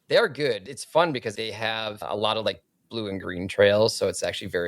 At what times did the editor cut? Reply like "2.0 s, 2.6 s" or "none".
1.4 s